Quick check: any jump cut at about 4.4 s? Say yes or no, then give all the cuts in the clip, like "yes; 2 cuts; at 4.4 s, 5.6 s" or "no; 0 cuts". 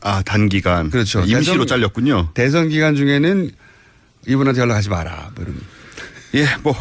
yes; 1 cut; at 4.4 s